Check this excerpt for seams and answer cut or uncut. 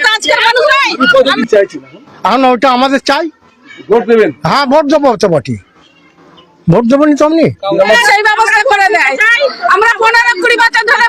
cut